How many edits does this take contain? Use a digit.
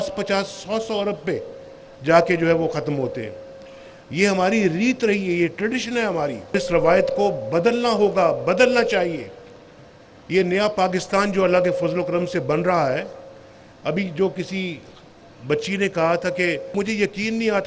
2